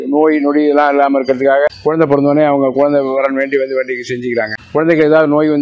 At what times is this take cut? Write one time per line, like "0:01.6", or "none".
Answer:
0:01.8
0:04.6